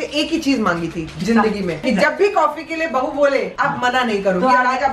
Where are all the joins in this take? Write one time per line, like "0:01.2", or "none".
0:01.8